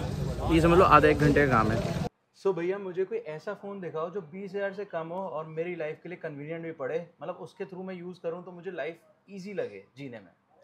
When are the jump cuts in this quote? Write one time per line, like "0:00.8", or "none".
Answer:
0:02.0